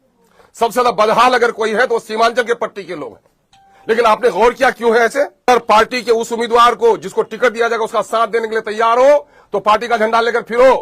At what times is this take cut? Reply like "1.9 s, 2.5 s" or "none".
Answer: 5.5 s